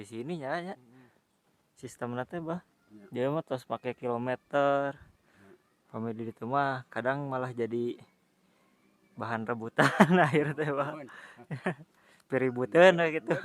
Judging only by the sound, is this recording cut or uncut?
uncut